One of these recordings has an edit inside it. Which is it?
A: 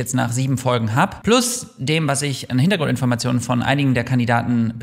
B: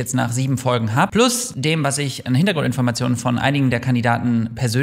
B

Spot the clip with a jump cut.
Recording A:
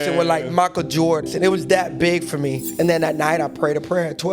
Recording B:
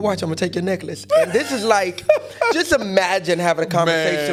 A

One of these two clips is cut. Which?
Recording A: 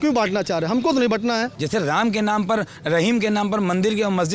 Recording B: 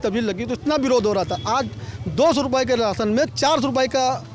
A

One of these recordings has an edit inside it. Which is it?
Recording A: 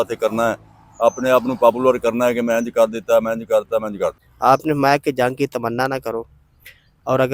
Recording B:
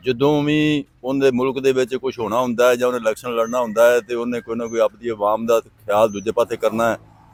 A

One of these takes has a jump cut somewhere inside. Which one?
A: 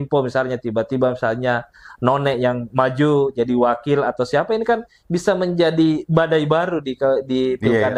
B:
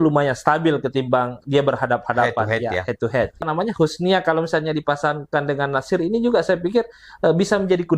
B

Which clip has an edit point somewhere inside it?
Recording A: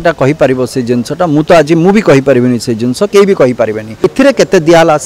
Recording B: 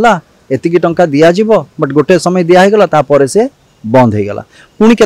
A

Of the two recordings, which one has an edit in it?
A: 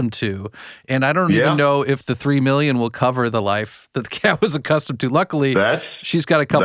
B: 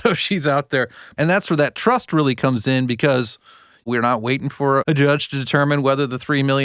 B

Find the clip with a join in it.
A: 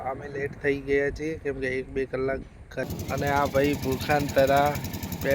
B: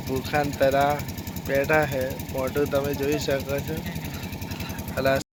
A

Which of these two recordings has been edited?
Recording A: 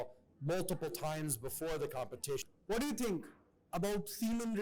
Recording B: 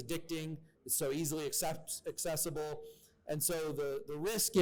A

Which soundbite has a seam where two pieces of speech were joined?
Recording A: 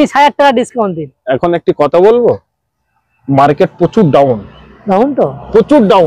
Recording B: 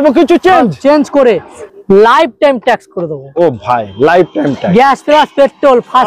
B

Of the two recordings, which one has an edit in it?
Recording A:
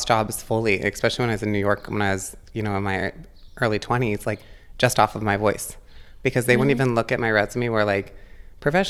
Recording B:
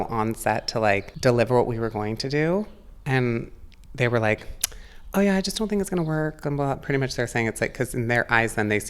B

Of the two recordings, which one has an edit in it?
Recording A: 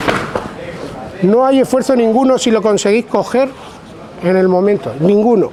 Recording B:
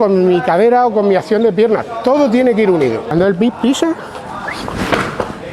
B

